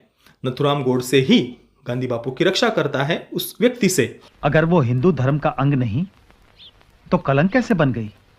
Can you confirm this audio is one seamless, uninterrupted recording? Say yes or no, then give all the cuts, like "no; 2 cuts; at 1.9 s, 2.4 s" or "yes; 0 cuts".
no; 1 cut; at 4.2 s